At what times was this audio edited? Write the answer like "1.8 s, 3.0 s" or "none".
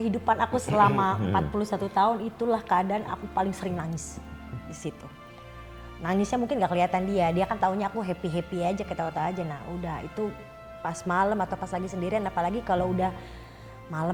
none